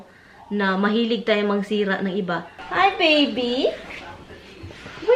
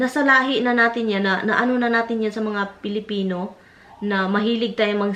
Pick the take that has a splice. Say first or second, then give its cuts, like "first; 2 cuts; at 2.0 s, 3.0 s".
first; 1 cut; at 2.6 s